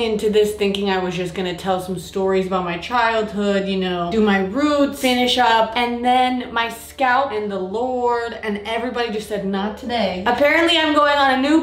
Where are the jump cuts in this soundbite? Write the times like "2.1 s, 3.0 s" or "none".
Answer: none